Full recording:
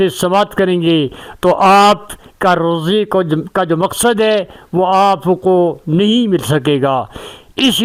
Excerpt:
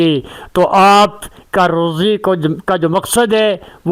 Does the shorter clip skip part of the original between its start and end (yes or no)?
no